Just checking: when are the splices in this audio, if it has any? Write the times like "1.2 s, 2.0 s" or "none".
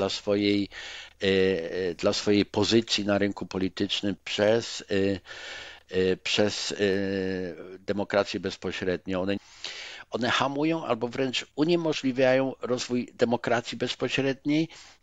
9.4 s